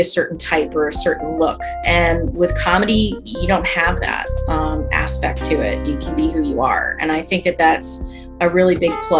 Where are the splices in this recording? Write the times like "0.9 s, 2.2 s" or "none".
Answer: 1.8 s